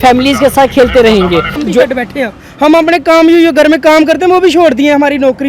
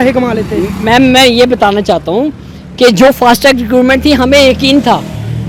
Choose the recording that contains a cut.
first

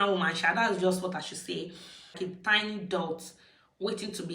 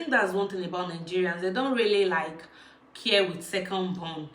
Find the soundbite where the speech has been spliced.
first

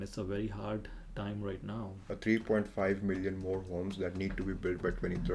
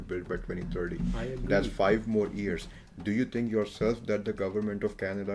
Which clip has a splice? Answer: first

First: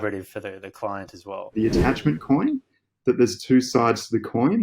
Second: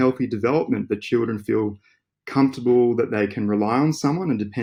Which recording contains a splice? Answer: first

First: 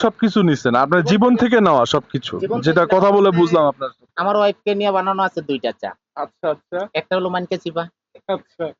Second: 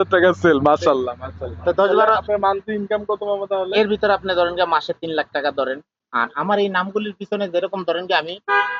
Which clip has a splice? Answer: second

